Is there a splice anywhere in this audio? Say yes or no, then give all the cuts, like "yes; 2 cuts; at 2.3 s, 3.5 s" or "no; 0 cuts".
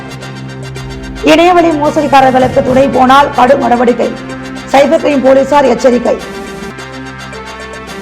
yes; 1 cut; at 7.0 s